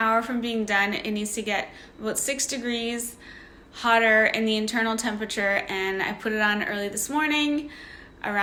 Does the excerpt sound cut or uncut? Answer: uncut